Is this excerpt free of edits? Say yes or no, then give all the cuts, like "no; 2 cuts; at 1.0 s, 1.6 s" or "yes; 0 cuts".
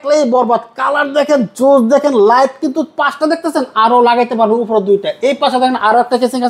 yes; 0 cuts